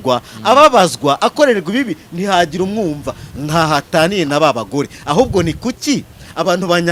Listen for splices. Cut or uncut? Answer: uncut